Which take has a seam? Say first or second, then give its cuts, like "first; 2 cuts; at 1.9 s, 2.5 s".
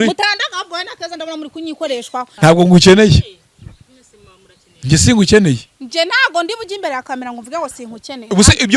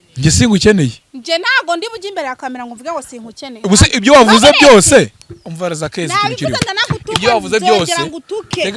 first; 1 cut; at 2.3 s